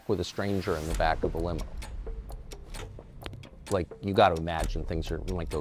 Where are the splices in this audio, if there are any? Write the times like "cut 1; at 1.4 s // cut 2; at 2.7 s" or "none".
none